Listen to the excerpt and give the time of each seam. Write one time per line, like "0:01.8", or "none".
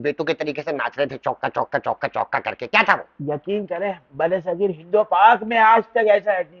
none